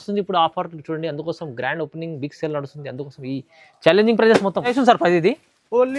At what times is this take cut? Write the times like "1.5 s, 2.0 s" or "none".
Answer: 4.7 s